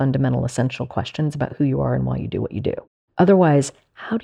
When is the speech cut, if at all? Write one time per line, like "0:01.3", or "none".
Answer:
0:03.0